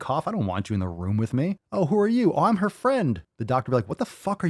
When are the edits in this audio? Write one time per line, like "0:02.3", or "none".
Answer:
0:01.6
0:03.3